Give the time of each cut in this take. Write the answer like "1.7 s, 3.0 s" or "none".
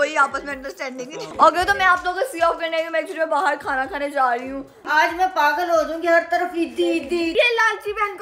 1.3 s, 4.8 s, 7.3 s